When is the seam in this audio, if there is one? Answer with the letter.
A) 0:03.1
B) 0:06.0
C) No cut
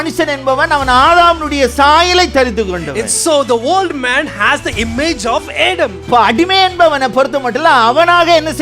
B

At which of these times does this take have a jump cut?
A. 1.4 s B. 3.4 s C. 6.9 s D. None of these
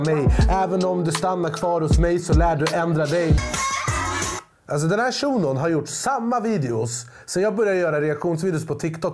B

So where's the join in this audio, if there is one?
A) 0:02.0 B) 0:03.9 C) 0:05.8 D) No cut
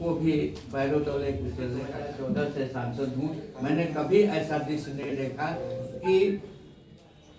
A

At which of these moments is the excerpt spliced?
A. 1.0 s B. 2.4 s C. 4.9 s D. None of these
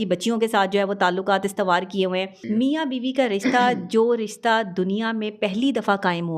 B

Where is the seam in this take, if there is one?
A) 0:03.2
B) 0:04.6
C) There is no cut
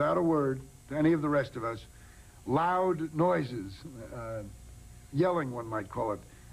C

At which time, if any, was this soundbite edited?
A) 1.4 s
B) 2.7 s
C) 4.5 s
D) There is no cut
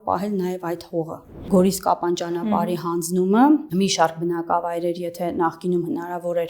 A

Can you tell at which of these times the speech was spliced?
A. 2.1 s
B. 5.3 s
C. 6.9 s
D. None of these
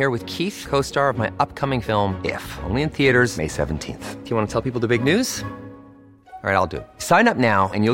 D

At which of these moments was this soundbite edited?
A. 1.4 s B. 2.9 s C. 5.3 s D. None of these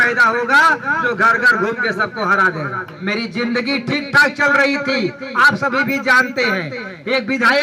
B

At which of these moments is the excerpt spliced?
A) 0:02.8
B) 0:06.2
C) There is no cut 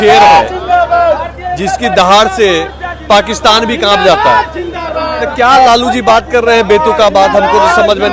C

